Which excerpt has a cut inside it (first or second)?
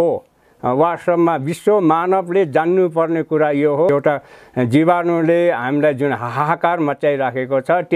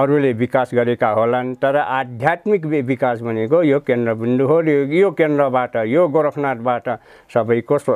first